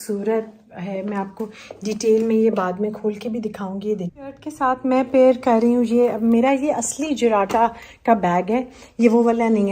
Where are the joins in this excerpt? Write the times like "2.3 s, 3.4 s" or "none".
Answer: 4.1 s